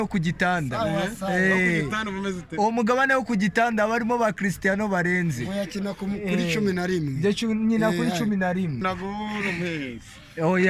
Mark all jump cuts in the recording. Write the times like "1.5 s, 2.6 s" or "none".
8.8 s